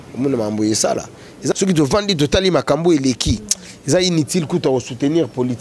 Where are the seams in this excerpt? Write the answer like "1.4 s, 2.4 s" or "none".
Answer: 1.5 s

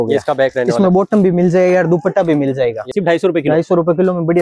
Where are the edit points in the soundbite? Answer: 2.9 s

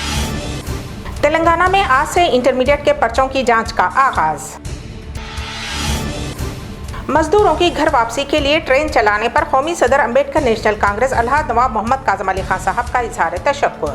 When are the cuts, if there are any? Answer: 1.0 s

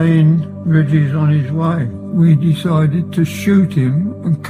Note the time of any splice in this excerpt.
2.0 s

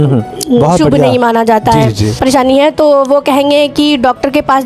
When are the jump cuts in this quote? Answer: 2.1 s

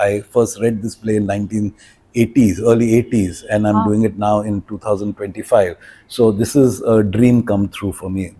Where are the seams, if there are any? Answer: none

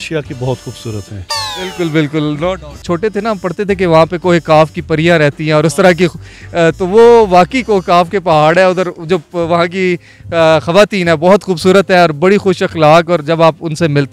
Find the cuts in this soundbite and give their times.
2.8 s

